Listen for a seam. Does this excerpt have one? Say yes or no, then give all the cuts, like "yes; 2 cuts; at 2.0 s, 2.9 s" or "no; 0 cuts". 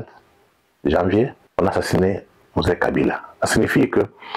yes; 1 cut; at 1.4 s